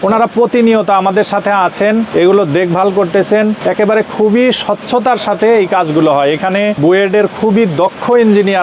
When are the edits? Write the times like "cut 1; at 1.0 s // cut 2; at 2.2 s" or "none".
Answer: cut 1; at 2.1 s // cut 2; at 3.6 s // cut 3; at 6.8 s